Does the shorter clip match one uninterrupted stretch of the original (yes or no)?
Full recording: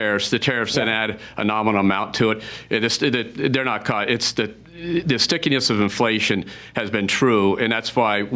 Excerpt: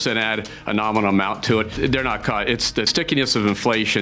no